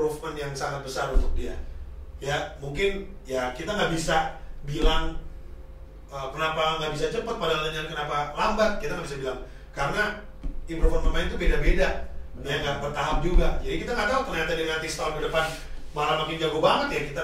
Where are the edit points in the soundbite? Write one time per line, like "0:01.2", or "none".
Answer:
none